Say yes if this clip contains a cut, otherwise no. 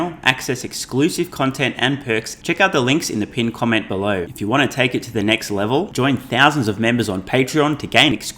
yes